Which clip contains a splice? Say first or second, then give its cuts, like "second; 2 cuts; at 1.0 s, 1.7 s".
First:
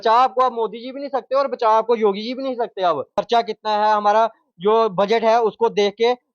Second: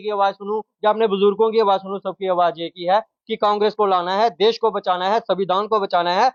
first; 1 cut; at 3.1 s